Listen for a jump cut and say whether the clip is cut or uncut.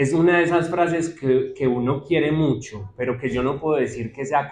uncut